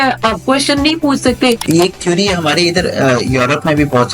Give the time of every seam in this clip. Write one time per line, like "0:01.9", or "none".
0:01.6